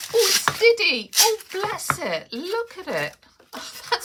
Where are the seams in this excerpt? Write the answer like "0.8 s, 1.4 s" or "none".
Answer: none